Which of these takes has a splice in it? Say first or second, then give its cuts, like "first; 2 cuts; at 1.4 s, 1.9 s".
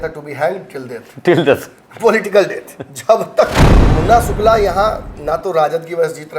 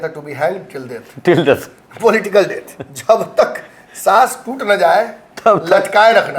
first; 1 cut; at 3.8 s